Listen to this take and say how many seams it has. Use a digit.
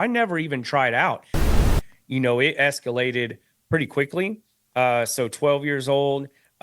1